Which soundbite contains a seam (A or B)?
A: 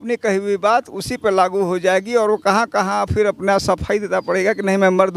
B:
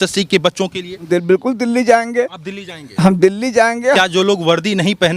B